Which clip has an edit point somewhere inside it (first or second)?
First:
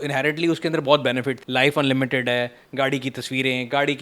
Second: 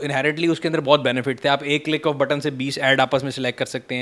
first